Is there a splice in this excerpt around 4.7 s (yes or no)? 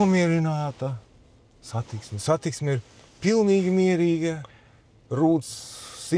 no